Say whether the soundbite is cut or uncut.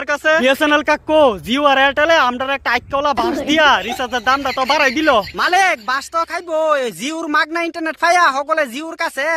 uncut